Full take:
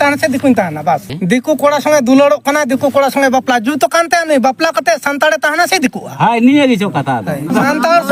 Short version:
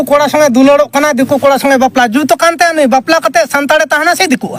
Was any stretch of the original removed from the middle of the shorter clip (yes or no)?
no